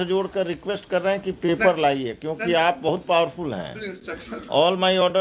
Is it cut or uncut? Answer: uncut